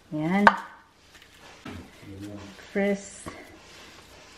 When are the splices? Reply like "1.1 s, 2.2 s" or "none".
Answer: 1.7 s